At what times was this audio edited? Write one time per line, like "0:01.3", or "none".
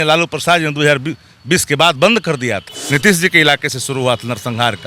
0:02.7